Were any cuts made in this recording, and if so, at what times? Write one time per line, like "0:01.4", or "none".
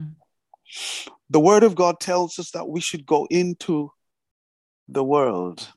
none